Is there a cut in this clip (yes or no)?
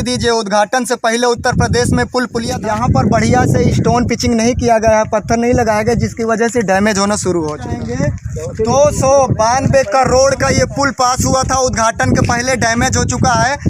yes